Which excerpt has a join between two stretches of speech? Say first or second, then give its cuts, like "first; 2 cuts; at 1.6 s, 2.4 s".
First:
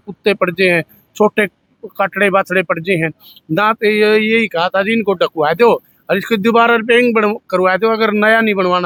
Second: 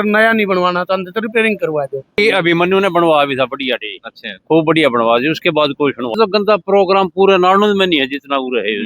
second; 2 cuts; at 2.2 s, 6.2 s